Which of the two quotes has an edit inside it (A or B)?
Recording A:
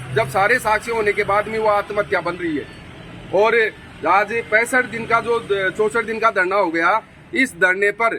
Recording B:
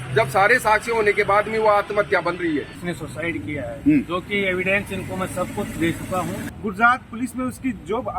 B